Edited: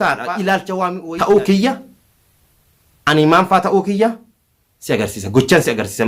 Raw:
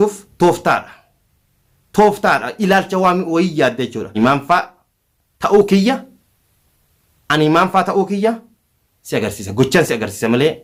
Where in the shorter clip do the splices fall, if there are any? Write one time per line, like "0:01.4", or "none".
0:01.0